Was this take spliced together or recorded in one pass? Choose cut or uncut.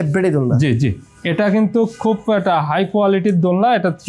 uncut